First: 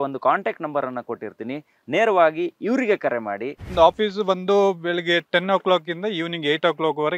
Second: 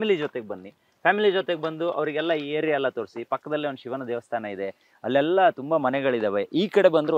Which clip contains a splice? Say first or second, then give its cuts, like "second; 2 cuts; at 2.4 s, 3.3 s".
first; 1 cut; at 3.6 s